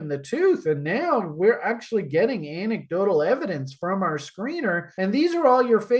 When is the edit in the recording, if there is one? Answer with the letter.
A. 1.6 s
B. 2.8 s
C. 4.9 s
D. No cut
C